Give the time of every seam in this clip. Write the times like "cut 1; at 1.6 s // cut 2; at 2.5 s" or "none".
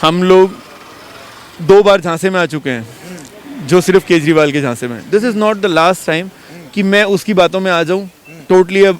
none

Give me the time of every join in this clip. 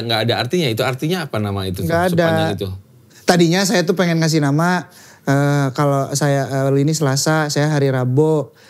none

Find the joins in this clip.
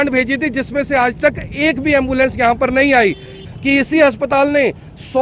cut 1; at 3.5 s

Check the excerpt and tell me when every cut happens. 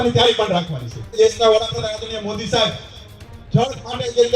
cut 1; at 1.2 s

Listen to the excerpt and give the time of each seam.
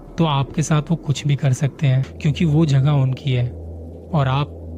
cut 1; at 2.1 s

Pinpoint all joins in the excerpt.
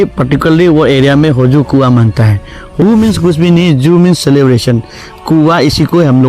cut 1; at 2.8 s

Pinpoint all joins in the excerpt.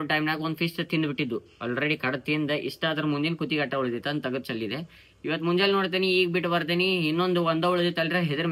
none

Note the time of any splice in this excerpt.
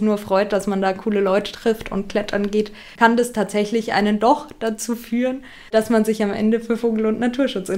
cut 1; at 2.8 s // cut 2; at 5.7 s

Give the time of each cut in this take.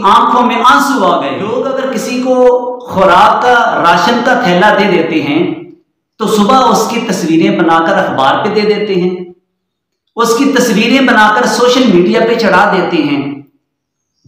cut 1; at 1.6 s

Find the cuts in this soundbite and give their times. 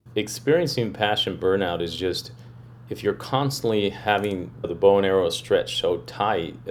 cut 1; at 4.7 s

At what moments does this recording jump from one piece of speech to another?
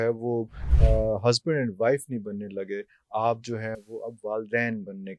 none

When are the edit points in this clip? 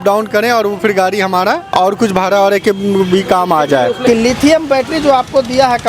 cut 1; at 1.6 s // cut 2; at 4.1 s

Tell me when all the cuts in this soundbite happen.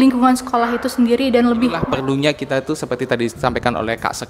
cut 1; at 1.8 s

